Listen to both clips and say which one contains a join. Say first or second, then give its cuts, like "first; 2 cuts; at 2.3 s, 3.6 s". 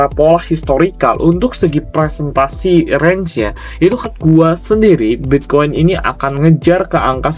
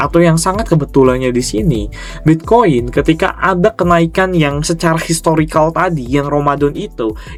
first; 1 cut; at 4.1 s